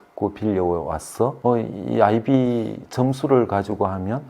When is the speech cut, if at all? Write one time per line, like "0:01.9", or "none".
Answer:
0:01.4